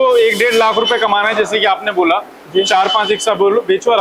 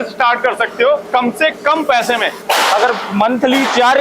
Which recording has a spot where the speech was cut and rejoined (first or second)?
second